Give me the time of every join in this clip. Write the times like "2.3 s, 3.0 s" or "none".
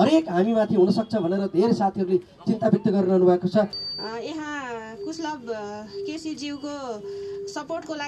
3.8 s